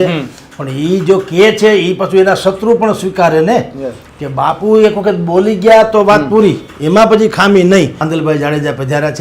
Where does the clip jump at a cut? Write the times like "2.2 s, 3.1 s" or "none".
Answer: 8.0 s